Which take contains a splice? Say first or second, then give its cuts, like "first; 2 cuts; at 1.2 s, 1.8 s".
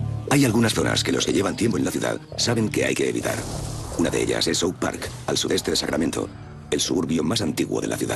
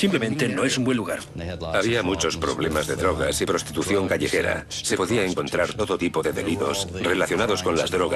second; 1 cut; at 2.3 s